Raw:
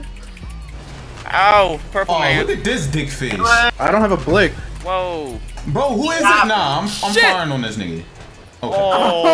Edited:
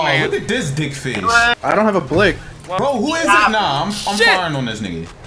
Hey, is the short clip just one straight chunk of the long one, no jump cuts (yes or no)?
no